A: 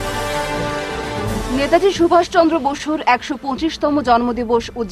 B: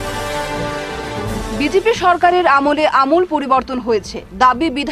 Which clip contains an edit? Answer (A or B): B